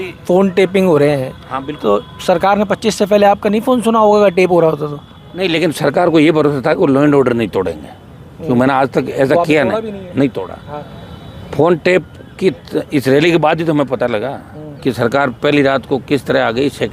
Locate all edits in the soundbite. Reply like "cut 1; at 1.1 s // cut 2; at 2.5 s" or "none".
none